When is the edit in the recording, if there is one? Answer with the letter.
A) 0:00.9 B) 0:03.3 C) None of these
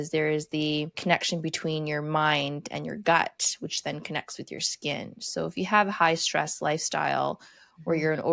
A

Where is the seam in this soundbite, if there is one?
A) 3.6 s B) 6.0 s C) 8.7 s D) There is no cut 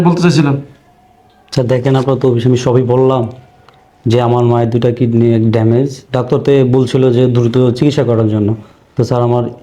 D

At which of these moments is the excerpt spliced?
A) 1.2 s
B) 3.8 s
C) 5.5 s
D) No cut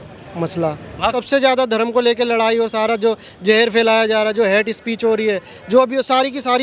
A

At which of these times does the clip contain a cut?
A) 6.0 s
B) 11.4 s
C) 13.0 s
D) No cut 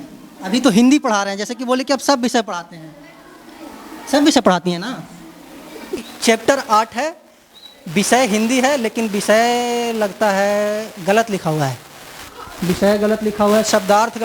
A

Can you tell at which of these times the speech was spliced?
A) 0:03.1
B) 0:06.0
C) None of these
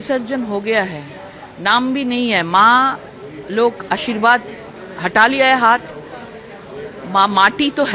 C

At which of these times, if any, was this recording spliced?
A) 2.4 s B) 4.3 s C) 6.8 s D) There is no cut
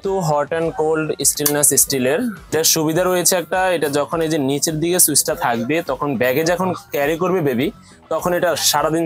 A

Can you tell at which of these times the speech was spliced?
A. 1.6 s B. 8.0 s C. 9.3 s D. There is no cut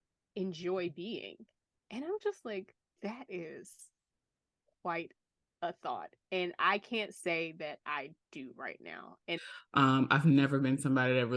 C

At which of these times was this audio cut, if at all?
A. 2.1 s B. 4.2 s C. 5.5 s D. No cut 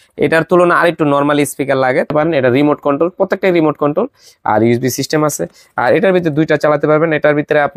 A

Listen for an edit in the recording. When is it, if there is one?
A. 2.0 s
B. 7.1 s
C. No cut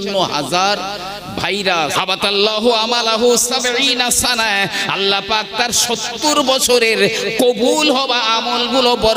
A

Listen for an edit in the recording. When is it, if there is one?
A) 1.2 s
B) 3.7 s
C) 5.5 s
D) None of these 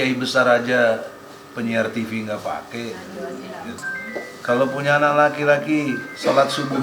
B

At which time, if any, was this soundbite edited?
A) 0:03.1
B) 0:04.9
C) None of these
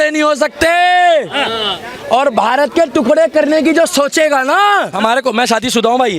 B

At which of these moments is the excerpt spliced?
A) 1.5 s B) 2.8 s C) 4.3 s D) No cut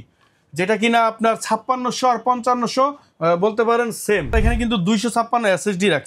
C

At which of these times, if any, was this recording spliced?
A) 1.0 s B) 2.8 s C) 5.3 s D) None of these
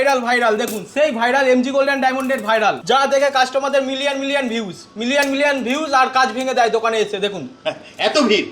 B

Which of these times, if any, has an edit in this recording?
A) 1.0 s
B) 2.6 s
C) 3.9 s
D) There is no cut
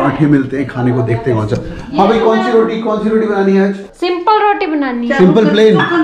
C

